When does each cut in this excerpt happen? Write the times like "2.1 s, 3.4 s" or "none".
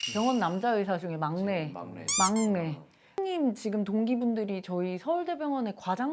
3.2 s